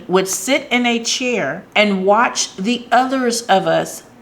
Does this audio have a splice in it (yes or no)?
yes